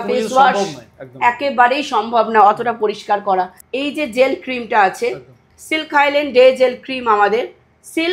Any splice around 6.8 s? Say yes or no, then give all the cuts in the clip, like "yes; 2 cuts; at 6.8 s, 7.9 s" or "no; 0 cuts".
no; 1 cut; at 3.6 s